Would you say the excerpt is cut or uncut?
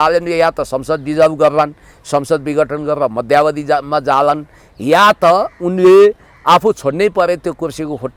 uncut